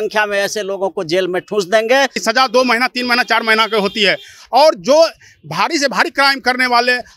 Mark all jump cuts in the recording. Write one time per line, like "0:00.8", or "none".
0:02.2